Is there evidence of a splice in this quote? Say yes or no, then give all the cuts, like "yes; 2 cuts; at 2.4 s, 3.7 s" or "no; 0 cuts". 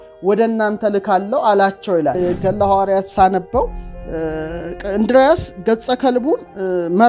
yes; 1 cut; at 2.2 s